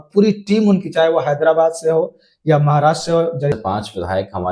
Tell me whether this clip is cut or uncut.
cut